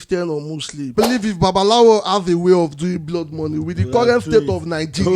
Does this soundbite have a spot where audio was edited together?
yes; 1 cut; at 0.9 s

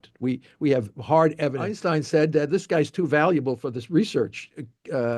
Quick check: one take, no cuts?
no; 1 cut; at 1.7 s

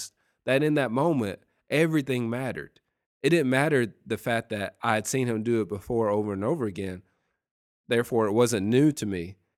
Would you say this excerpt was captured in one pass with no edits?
yes; 0 cuts

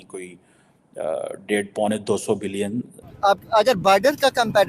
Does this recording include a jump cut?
yes; 1 cut; at 3.0 s

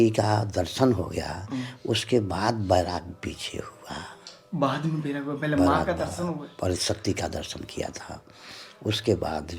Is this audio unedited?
yes; 0 cuts

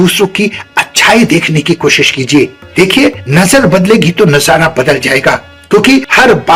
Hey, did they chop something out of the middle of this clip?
no; 0 cuts

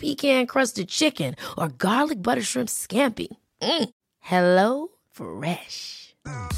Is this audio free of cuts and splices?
yes; 0 cuts

